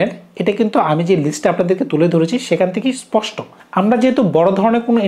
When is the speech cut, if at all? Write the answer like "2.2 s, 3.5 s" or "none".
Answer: none